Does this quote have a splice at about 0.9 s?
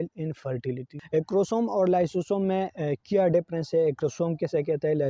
yes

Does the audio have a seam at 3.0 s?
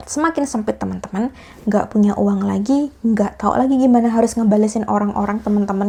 no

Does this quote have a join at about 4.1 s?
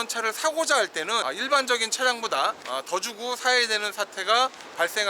no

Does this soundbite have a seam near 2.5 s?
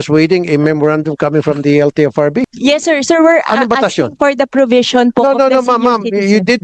yes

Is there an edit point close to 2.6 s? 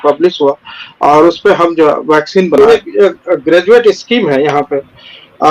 yes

